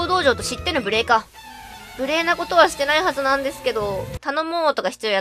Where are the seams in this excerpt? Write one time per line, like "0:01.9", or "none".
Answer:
0:04.1